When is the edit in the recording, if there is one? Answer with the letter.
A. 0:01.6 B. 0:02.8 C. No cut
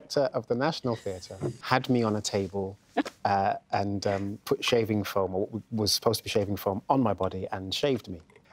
A